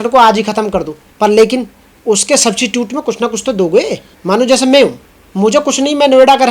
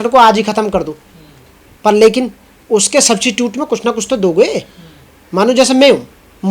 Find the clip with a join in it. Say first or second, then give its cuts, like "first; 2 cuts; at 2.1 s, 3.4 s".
first; 2 cuts; at 1.0 s, 4.1 s